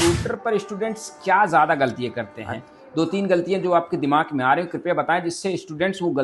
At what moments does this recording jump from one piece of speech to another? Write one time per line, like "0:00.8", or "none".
none